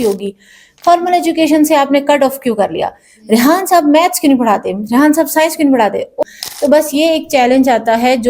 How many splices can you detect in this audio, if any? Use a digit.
1